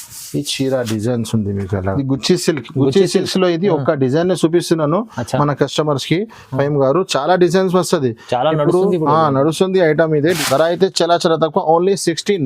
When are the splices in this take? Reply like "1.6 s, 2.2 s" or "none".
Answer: 1.9 s, 10.4 s